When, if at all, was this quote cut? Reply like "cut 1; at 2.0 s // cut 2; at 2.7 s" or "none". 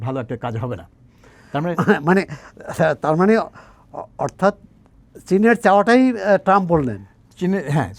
none